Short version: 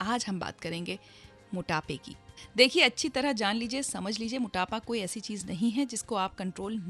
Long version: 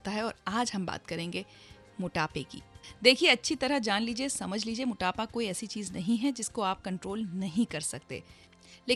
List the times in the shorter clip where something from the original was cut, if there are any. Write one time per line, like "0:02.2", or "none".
none